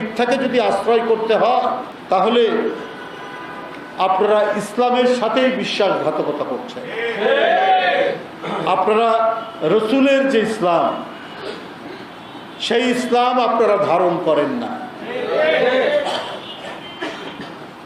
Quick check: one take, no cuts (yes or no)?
yes